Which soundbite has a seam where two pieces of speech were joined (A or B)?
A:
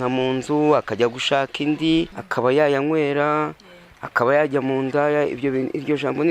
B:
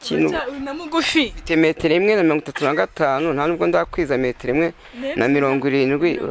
A